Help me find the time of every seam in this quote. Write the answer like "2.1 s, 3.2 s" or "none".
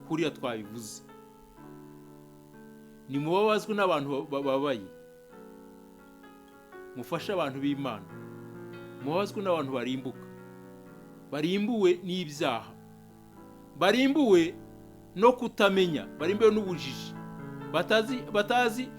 1.1 s, 3.0 s, 4.9 s, 6.5 s

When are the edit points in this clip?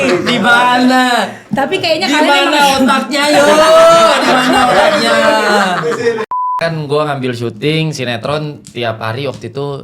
6.5 s

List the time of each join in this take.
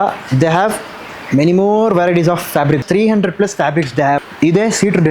2.8 s, 4.3 s

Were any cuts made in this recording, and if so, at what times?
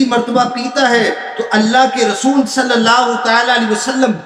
none

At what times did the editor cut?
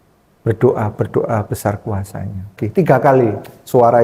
2.6 s

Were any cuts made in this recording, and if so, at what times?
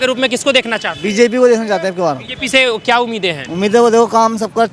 2.3 s, 3.4 s

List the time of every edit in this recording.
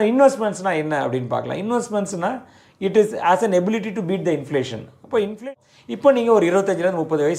5.4 s

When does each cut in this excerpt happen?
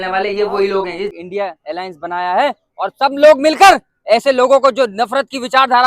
1.1 s

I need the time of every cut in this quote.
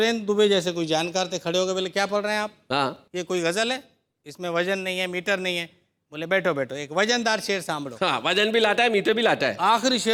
none

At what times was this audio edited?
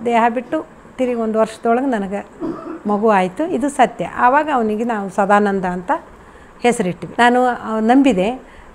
7.0 s

